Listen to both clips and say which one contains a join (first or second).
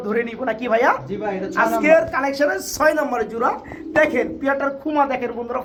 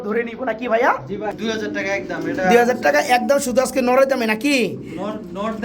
second